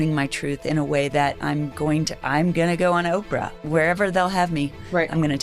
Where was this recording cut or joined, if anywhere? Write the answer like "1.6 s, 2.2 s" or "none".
3.6 s